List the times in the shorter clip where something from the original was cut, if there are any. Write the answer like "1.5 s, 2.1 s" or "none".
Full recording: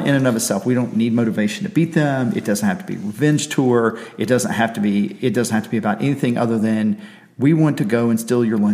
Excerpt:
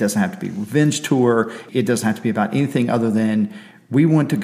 1.7 s